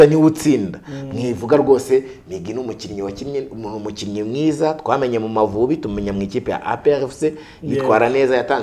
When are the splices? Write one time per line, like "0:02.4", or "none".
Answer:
none